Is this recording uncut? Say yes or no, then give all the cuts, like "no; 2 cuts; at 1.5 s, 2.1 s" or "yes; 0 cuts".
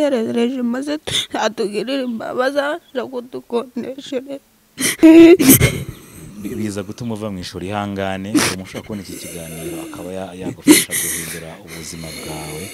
no; 1 cut; at 5.0 s